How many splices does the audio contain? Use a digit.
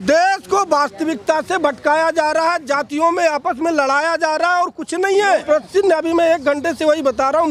1